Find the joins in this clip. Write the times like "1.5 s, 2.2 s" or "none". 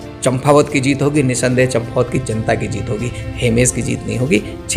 none